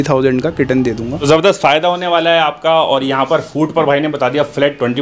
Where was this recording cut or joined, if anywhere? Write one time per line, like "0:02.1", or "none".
0:01.2